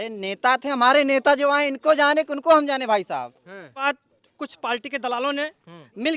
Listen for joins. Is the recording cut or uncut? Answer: cut